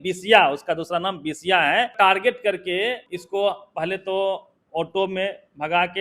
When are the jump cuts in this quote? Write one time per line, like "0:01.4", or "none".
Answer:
0:01.9
0:03.1